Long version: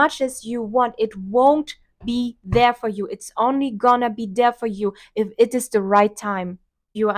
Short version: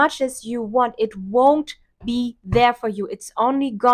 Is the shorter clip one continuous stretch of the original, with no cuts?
yes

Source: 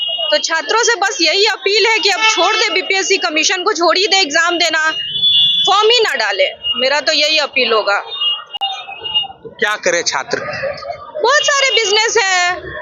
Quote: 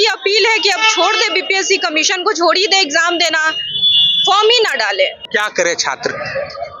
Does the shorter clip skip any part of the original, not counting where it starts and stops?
yes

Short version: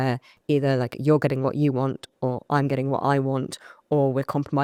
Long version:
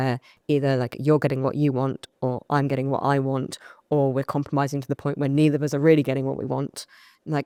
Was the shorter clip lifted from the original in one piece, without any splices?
yes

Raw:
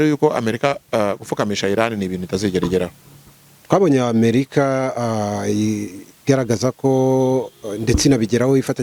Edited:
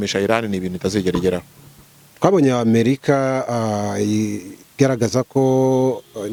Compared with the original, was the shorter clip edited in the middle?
no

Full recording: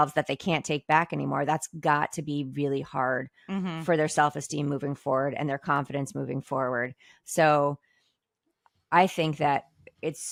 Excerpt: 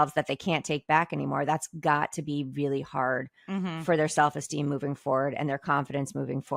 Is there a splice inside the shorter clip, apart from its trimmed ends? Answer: no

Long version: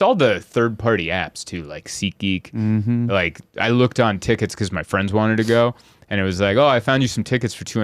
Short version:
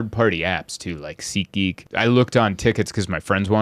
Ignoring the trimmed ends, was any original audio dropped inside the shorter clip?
yes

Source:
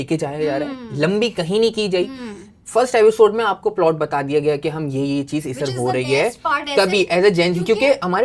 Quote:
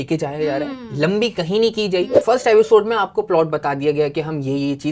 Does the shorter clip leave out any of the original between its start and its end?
yes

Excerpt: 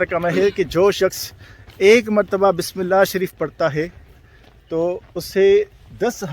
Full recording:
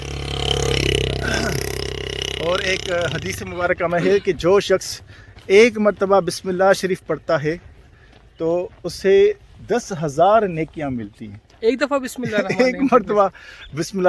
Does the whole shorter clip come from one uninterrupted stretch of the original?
yes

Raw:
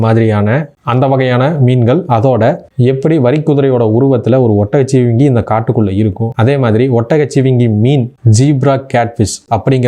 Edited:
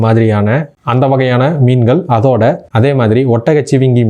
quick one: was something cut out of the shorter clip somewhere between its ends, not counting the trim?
yes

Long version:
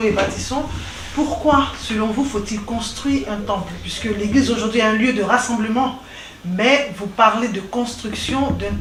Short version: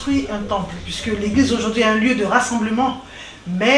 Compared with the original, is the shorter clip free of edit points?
yes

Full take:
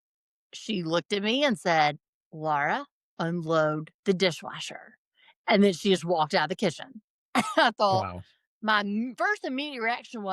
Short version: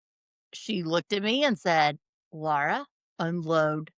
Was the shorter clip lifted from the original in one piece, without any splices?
yes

